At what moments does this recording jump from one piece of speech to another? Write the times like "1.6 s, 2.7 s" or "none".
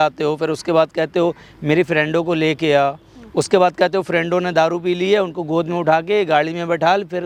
none